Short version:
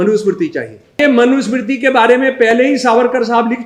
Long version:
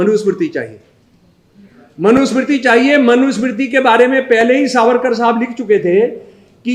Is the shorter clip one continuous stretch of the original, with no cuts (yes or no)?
no